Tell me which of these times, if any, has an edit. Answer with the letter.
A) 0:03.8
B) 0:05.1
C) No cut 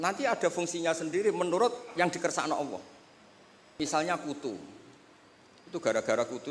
A